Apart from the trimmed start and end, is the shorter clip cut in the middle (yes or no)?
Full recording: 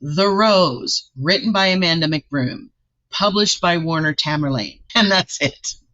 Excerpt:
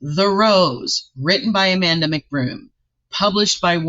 no